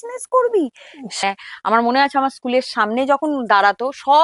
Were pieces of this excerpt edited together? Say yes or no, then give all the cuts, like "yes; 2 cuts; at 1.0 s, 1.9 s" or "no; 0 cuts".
yes; 1 cut; at 1.1 s